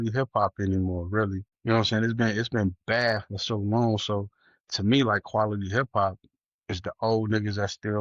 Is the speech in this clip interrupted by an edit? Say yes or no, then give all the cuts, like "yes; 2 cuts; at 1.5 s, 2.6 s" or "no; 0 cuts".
yes; 1 cut; at 1.5 s